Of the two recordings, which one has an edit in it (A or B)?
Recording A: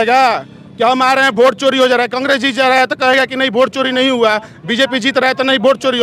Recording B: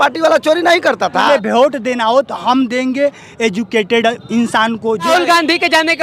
B